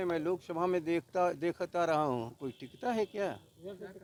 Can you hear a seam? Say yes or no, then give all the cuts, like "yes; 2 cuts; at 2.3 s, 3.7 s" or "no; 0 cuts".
no; 0 cuts